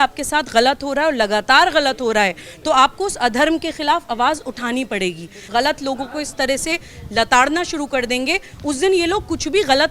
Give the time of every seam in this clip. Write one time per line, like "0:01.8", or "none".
0:05.5